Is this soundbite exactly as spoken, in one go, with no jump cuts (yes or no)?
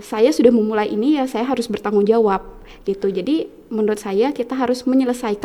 yes